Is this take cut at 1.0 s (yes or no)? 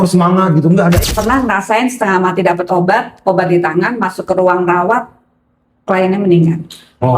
yes